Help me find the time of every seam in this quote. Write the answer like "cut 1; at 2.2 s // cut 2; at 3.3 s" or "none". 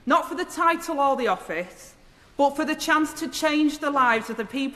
none